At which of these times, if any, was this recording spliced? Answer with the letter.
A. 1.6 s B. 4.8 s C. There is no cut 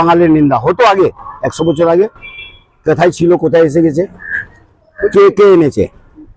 C